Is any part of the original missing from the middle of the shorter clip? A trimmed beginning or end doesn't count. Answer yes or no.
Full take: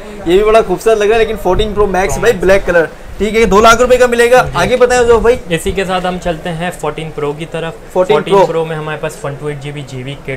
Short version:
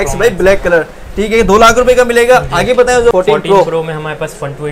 yes